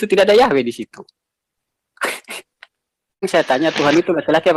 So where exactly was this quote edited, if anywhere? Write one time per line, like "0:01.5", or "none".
0:03.3